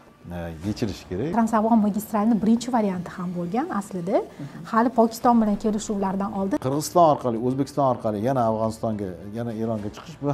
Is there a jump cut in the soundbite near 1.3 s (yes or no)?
yes